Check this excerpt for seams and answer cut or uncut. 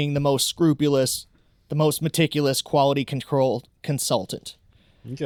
uncut